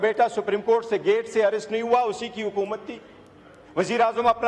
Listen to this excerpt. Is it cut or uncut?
uncut